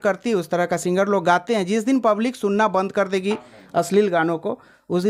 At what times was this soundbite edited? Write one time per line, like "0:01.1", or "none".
none